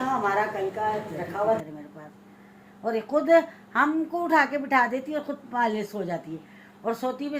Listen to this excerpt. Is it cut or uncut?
cut